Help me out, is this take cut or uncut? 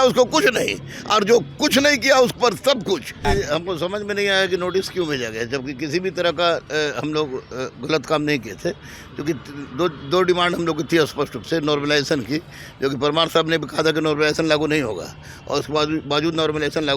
cut